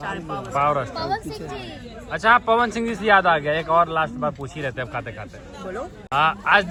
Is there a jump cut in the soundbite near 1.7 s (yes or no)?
no